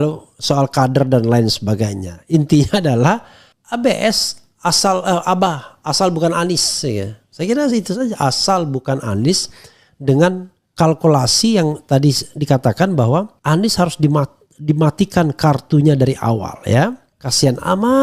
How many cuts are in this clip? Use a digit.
1